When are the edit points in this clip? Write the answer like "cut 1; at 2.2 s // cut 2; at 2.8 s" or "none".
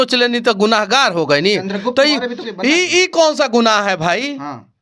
none